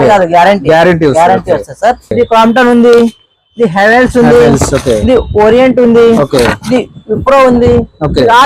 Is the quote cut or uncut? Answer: cut